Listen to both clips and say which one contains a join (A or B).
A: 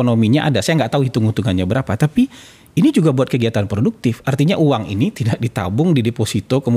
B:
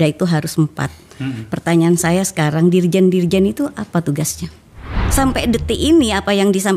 B